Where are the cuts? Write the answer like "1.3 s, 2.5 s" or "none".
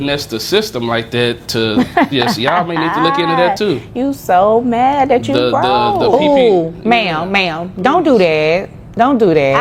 none

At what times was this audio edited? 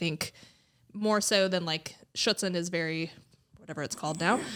none

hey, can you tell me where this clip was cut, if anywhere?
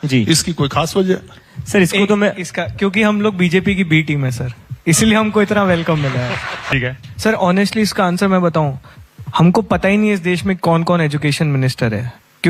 6.7 s

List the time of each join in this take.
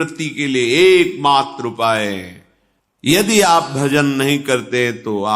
3.1 s

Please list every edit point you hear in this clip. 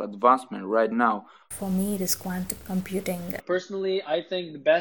1.5 s, 3.3 s

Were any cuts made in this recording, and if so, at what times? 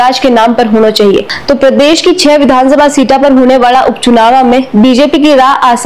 1.3 s

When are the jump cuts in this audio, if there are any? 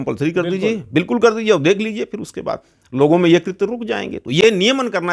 none

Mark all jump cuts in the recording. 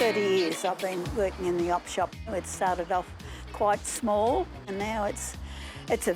2.3 s, 4.7 s

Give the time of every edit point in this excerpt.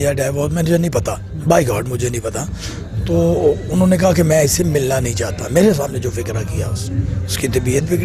none

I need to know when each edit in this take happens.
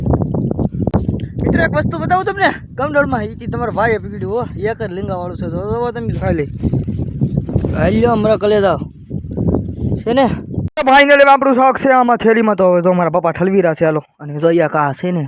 0.9 s, 10.7 s

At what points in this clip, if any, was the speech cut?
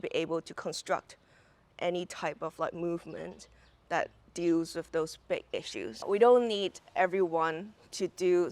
6.0 s

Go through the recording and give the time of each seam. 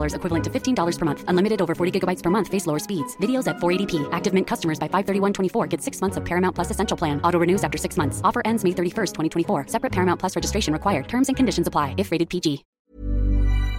12.7 s

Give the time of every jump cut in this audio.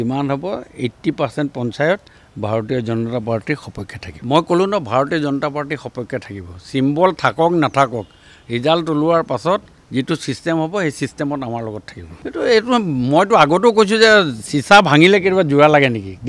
none

